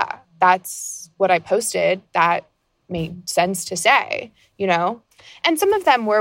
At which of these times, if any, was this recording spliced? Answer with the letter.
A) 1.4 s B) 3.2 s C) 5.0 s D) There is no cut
C